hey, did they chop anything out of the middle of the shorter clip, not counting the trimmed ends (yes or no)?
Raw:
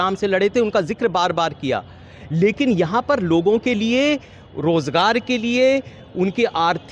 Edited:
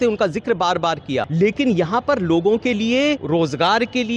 yes